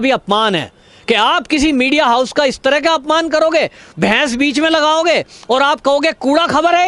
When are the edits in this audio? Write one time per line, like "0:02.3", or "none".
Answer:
none